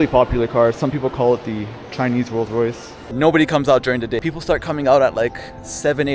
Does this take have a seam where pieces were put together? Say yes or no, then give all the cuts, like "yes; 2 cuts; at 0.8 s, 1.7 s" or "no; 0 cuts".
yes; 2 cuts; at 2.9 s, 4.2 s